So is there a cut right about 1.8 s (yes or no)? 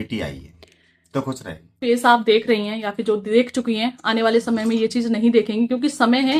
yes